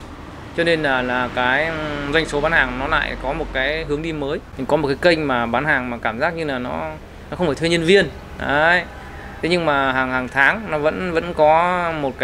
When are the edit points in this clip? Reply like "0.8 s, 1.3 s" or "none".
4.5 s

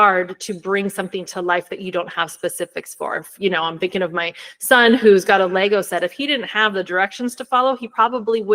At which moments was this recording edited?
none

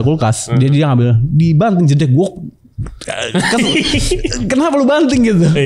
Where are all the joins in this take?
none

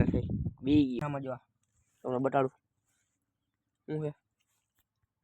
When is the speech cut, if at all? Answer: 1.0 s

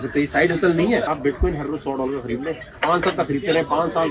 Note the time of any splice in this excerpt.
1.1 s

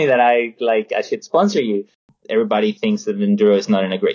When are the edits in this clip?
2.1 s

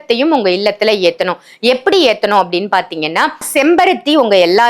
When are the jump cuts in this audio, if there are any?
none

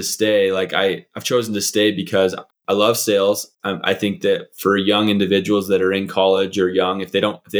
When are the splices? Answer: 2.5 s

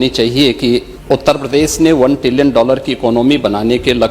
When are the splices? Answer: 0.9 s

